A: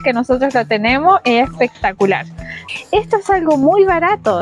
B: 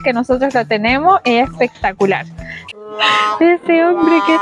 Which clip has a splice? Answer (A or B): B